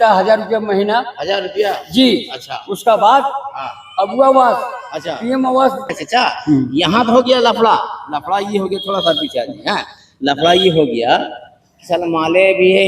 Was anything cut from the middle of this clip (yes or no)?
yes